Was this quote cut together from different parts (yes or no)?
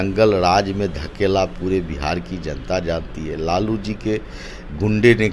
no